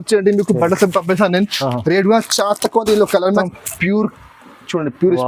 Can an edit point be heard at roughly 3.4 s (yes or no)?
yes